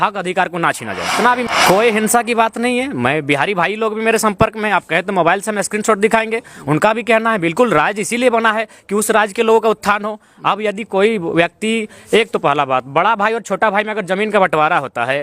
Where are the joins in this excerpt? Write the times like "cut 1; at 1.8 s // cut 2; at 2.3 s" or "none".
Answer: cut 1; at 1.5 s